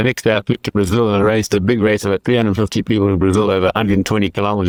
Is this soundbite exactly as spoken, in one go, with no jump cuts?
yes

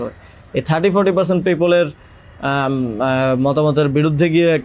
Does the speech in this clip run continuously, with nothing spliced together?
yes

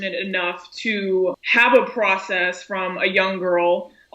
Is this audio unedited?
no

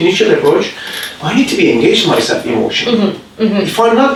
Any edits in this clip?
no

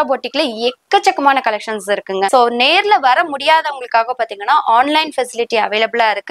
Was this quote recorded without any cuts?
no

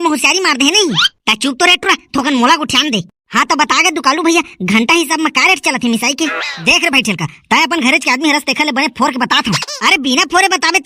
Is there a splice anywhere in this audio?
no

